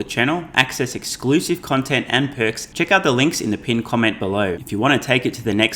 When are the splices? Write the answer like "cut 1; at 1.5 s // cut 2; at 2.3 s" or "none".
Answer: cut 1; at 2.6 s // cut 2; at 4.6 s